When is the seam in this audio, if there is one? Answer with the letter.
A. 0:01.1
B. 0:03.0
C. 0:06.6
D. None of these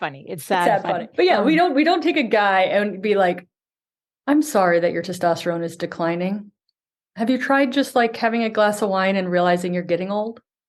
A